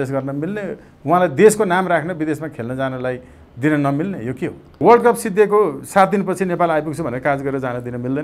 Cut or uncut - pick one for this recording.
cut